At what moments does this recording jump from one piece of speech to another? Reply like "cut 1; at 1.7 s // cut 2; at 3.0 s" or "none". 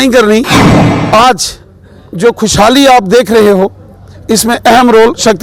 cut 1; at 0.9 s

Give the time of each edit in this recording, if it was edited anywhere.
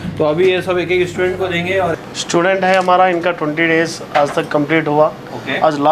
cut 1; at 1.9 s

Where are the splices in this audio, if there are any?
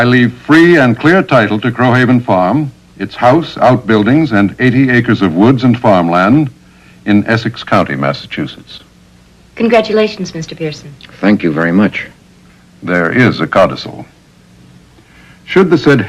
cut 1; at 3.9 s

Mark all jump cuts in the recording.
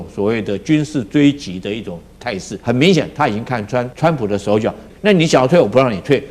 cut 1; at 2.5 s // cut 2; at 3.9 s // cut 3; at 4.9 s

